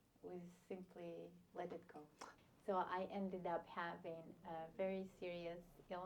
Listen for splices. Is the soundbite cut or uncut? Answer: cut